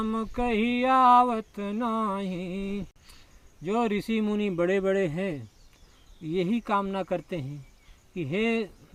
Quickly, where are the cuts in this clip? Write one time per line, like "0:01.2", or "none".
none